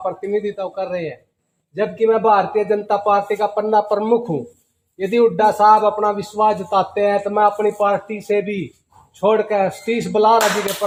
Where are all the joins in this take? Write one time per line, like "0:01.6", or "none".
none